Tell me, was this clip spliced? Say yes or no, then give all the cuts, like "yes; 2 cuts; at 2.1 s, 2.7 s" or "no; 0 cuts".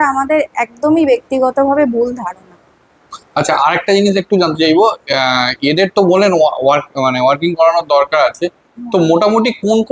no; 0 cuts